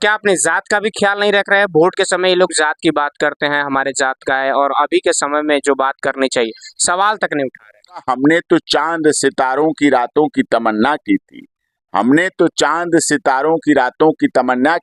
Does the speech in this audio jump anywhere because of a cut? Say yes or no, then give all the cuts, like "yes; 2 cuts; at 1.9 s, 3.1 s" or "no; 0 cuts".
yes; 1 cut; at 8.1 s